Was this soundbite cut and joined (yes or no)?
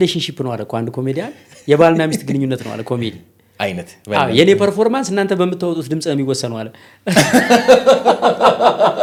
no